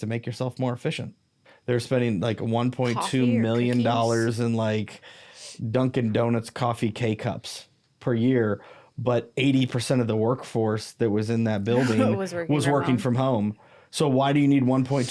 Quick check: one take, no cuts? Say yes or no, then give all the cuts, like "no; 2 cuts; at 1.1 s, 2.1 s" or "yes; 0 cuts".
no; 1 cut; at 1.5 s